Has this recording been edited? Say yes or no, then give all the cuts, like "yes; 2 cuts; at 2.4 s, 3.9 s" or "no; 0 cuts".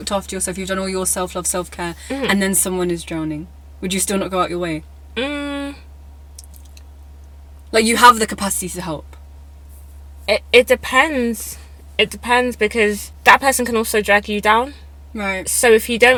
no; 0 cuts